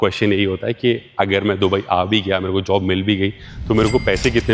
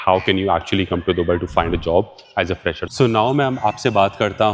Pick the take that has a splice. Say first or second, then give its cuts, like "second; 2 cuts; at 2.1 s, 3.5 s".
second; 1 cut; at 2.8 s